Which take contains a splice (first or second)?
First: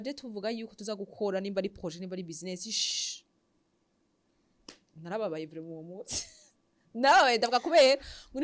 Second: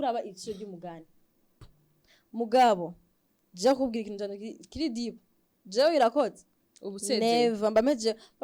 second